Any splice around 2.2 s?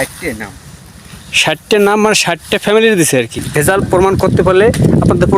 no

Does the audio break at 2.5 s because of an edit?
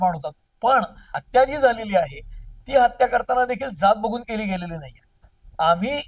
no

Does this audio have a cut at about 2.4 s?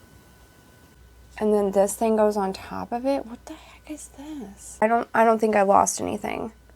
no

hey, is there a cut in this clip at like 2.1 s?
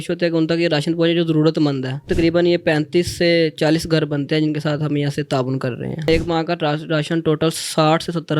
yes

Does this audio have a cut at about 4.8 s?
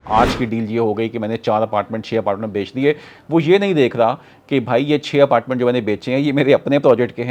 no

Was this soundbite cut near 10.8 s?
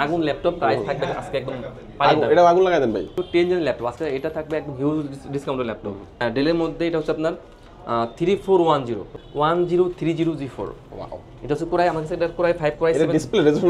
no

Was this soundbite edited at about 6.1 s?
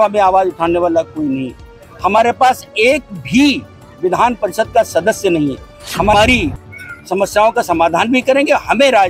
yes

